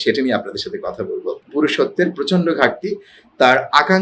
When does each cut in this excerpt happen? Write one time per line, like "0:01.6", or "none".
0:01.4